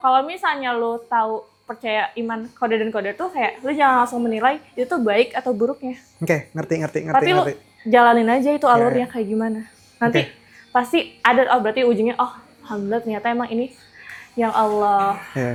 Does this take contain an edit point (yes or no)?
no